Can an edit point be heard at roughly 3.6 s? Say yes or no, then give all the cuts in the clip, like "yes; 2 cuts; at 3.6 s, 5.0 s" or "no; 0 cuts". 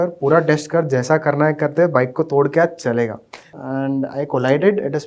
yes; 1 cut; at 3.6 s